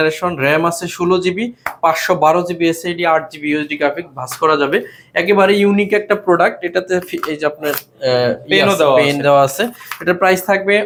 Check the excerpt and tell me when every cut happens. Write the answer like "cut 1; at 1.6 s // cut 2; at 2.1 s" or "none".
none

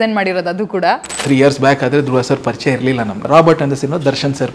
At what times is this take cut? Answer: cut 1; at 1.1 s // cut 2; at 3.2 s

